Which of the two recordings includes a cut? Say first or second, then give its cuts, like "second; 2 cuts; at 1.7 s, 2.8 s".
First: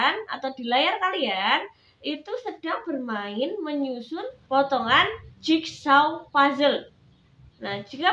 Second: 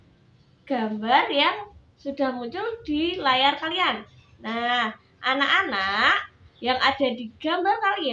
first; 1 cut; at 4.4 s